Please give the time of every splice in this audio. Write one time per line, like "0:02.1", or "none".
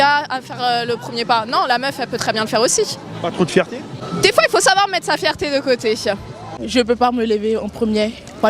0:04.0
0:06.6